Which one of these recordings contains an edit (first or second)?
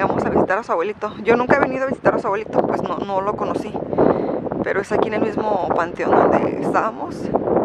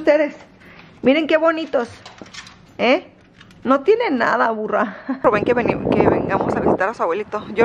second